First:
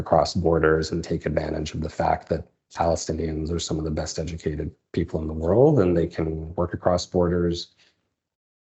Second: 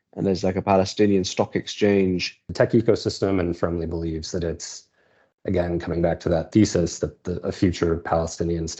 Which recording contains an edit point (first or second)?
second